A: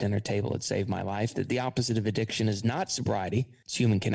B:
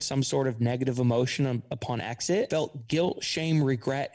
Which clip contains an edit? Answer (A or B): B